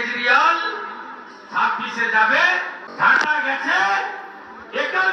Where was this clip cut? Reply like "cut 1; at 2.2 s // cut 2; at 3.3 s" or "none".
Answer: cut 1; at 2.8 s